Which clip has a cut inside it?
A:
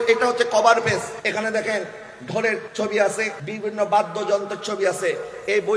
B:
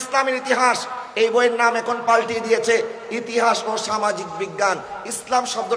A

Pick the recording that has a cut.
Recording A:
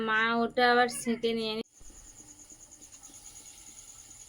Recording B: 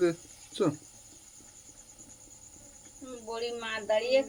A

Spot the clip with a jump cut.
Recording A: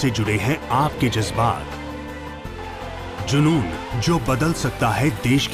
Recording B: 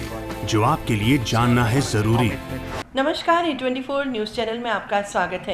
B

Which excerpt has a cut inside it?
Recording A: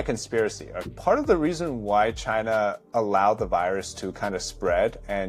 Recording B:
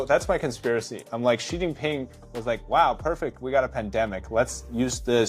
A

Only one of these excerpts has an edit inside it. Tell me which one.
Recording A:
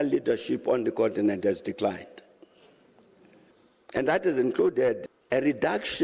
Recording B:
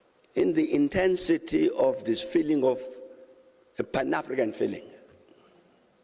A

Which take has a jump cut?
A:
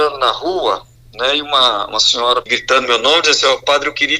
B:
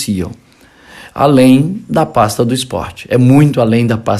A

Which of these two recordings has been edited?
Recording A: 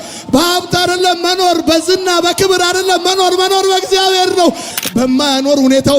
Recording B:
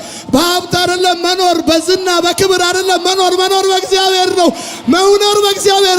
A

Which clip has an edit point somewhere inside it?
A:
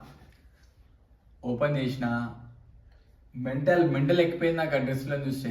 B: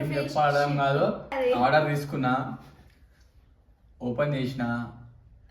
B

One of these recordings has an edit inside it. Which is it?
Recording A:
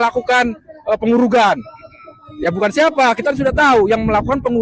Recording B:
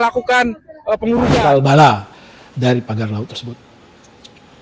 B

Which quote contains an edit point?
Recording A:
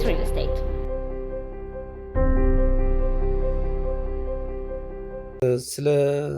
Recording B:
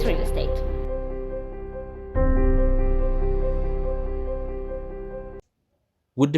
A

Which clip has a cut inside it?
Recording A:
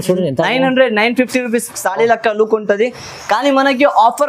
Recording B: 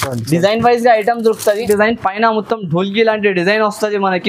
B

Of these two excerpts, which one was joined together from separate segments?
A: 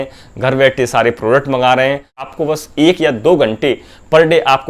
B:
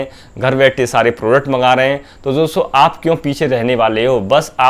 A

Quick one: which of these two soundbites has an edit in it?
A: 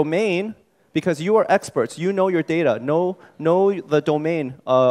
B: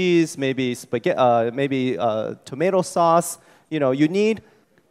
A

